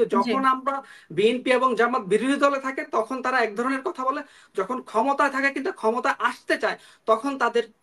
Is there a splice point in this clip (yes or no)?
no